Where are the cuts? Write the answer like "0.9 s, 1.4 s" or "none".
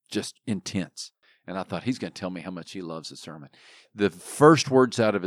none